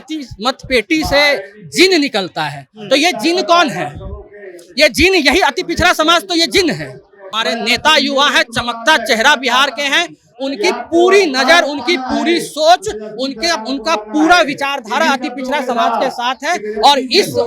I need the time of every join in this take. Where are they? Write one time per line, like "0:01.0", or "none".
0:07.3